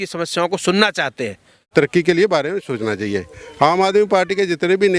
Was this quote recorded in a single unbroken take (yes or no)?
no